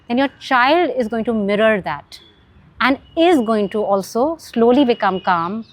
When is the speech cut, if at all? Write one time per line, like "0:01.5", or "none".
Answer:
none